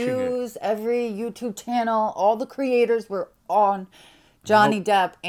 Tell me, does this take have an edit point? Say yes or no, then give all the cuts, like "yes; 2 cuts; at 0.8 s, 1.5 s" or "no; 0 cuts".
no; 0 cuts